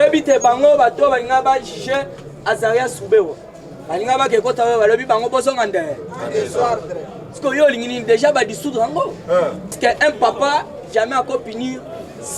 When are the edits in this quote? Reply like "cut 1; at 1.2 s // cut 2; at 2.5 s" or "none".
cut 1; at 9.8 s